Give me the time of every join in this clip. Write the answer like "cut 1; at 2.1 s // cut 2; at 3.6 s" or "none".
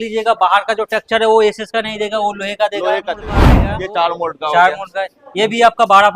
cut 1; at 3.7 s